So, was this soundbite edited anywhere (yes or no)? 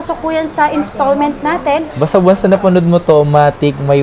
yes